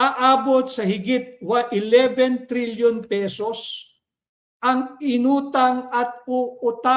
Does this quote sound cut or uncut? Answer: uncut